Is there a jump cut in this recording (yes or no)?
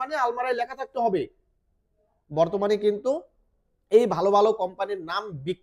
no